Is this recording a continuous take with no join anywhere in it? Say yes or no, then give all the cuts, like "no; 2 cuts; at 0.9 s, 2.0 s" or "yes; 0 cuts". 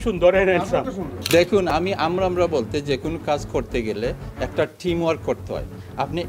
no; 1 cut; at 1.1 s